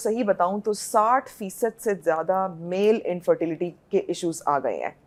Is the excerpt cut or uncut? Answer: uncut